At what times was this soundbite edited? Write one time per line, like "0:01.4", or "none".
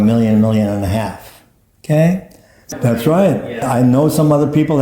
0:02.7
0:03.6